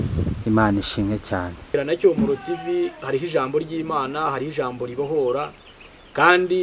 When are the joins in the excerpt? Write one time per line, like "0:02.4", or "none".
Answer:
0:01.7